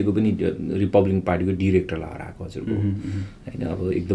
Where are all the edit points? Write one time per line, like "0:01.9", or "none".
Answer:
none